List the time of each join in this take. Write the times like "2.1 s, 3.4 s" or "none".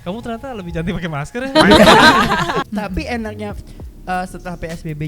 2.7 s